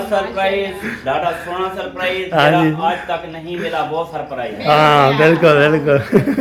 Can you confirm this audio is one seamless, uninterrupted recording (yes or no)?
yes